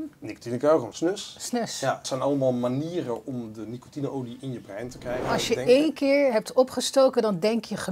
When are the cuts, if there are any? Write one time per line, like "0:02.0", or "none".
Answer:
0:00.9
0:02.1
0:05.2